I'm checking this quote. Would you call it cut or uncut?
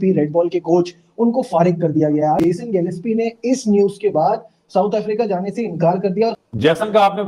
cut